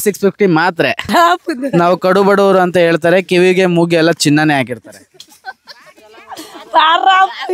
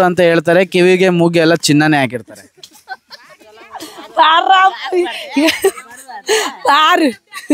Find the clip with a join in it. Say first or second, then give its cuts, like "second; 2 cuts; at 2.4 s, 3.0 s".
first; 1 cut; at 1.1 s